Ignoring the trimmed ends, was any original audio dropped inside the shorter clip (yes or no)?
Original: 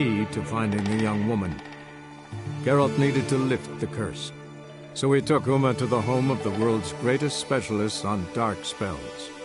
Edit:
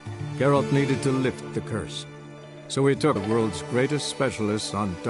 yes